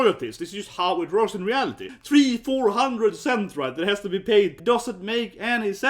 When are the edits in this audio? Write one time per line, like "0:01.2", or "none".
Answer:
0:01.9
0:04.6